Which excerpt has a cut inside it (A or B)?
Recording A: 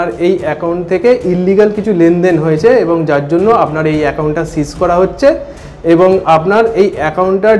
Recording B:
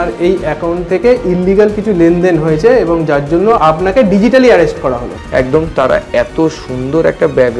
B